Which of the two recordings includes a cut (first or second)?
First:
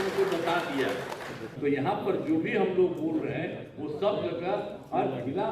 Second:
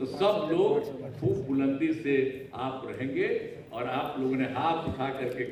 first